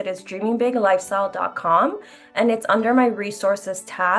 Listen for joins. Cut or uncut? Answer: uncut